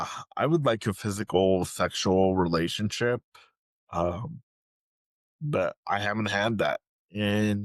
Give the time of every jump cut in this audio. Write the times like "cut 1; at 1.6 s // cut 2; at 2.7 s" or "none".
none